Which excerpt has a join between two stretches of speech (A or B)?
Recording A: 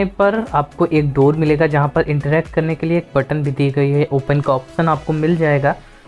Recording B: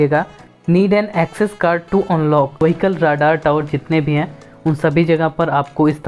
B